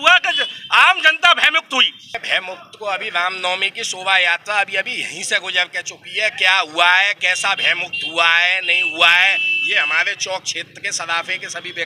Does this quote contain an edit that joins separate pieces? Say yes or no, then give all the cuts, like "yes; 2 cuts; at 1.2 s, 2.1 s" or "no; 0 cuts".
yes; 1 cut; at 2.2 s